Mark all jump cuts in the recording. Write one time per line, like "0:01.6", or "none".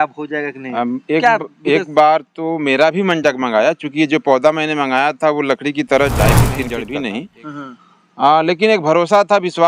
0:06.7